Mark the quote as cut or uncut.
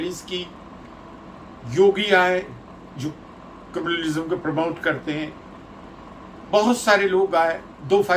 uncut